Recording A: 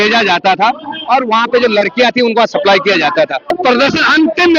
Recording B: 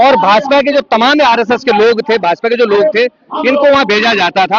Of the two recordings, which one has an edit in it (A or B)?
A